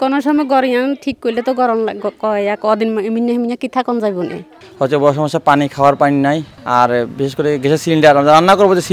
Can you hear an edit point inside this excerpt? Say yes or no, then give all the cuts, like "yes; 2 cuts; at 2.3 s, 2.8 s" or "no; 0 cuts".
yes; 2 cuts; at 4.6 s, 6.5 s